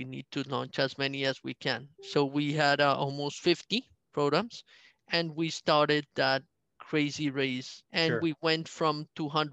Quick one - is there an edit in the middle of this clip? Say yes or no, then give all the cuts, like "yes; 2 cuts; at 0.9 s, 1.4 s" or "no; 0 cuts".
yes; 2 cuts; at 1.9 s, 7.8 s